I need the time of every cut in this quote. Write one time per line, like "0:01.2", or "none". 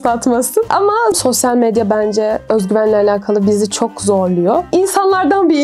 0:01.2
0:04.7